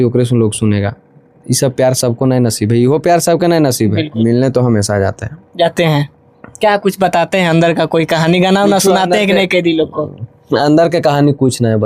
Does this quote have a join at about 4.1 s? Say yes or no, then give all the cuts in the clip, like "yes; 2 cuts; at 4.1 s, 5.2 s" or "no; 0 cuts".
yes; 1 cut; at 4.1 s